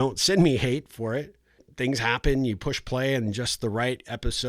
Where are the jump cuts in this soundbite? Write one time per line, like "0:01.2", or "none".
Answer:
0:01.7